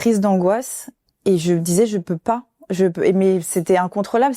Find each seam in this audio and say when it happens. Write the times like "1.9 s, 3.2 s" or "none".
none